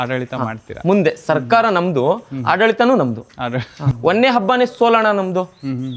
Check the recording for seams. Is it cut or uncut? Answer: cut